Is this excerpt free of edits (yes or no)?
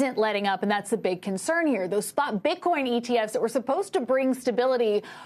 yes